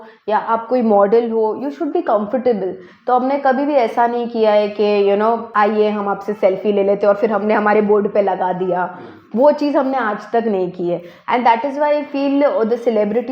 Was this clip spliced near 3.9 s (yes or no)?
no